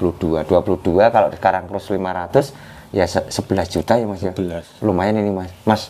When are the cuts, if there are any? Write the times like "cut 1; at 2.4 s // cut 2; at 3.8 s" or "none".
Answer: none